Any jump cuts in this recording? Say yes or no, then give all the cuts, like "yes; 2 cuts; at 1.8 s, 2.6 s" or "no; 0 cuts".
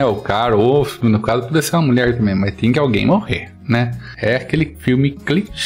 yes; 2 cuts; at 4.0 s, 4.8 s